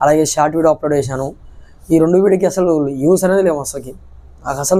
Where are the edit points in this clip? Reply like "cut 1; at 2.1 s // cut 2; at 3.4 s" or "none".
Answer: none